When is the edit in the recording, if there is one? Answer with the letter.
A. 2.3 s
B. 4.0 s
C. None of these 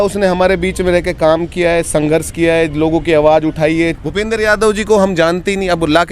B